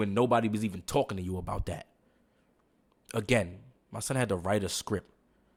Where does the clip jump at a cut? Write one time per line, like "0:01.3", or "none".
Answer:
none